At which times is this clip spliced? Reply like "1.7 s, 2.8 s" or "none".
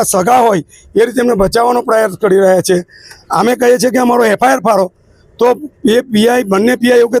none